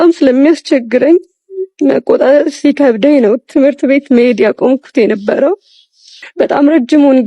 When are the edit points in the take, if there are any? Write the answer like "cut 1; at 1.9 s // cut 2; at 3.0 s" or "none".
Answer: none